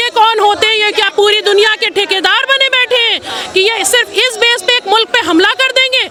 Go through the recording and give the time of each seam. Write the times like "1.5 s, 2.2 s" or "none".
none